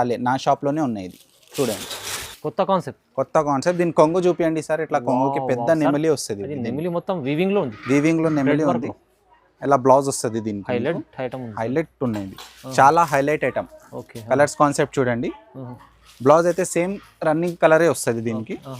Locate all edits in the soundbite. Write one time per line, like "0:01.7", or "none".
none